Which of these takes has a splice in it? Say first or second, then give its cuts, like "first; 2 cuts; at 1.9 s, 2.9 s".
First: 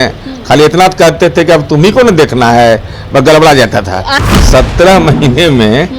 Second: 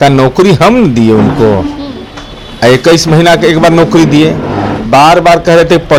first; 1 cut; at 4.1 s